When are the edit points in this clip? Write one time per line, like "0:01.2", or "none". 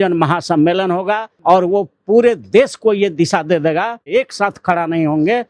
0:01.3
0:04.1